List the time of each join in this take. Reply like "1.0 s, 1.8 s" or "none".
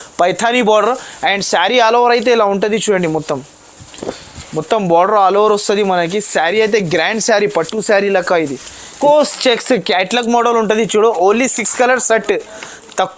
8.9 s

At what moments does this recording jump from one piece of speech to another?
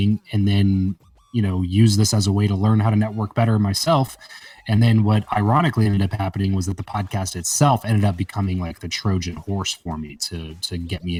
none

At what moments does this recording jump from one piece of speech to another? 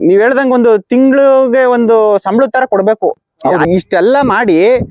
3.7 s

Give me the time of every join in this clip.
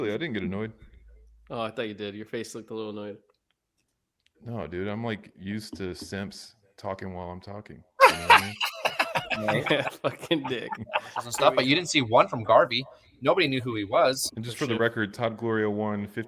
11.2 s, 14.3 s

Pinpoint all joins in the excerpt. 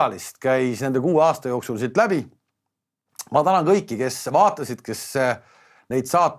none

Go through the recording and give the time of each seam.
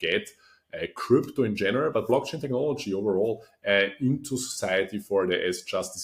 none

